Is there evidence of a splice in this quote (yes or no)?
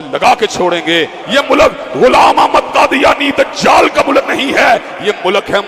yes